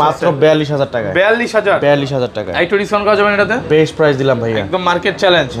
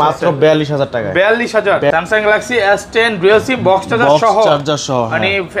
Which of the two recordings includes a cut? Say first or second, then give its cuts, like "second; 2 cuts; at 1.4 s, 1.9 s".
second; 1 cut; at 1.9 s